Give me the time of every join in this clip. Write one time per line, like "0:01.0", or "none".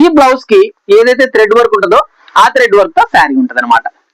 none